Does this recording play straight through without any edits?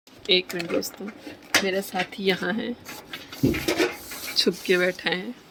yes; 0 cuts

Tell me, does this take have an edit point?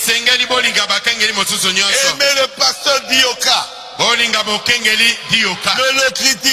no; 0 cuts

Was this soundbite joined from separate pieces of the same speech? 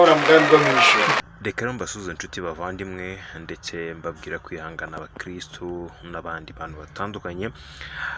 yes; 1 cut; at 1.2 s

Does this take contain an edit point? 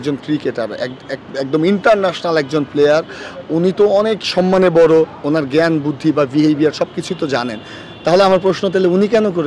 no; 0 cuts

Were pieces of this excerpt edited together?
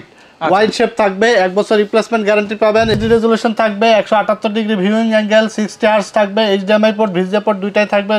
yes; 1 cut; at 2.9 s

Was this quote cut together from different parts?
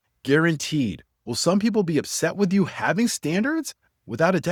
no; 0 cuts

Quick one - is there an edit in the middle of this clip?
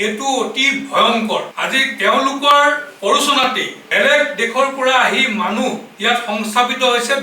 yes; 4 cuts; at 1.5 s, 2.9 s, 3.8 s, 5.9 s

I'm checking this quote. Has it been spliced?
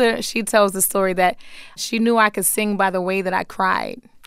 yes; 1 cut; at 1.8 s

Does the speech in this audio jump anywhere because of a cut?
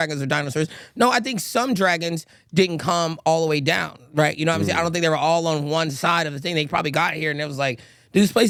no; 0 cuts

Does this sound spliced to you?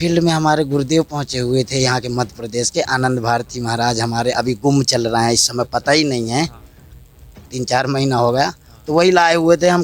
no; 0 cuts

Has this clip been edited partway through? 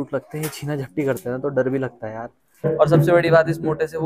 yes; 1 cut; at 2.6 s

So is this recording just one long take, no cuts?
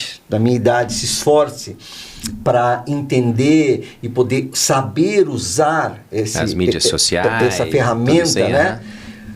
yes; 0 cuts

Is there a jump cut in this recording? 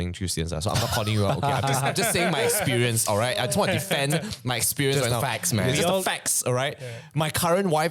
no; 0 cuts

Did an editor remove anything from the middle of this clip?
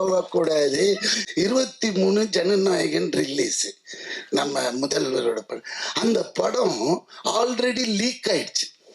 yes; 1 cut; at 1.1 s

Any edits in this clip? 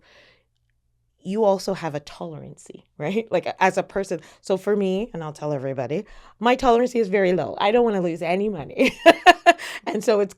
no; 0 cuts

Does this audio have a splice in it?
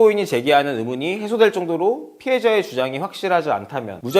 no; 0 cuts

